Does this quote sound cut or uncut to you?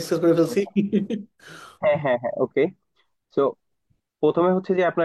uncut